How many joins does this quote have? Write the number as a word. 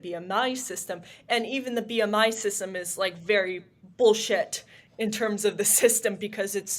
zero